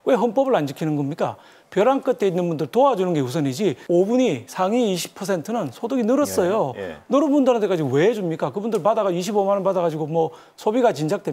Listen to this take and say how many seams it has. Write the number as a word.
two